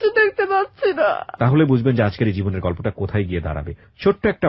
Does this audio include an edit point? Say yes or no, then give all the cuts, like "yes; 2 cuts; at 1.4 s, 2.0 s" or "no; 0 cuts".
yes; 1 cut; at 1.3 s